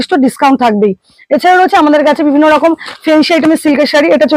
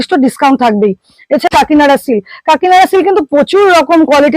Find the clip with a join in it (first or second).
second